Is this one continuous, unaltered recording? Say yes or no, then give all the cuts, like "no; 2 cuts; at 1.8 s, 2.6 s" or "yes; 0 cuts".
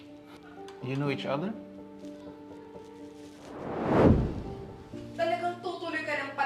yes; 0 cuts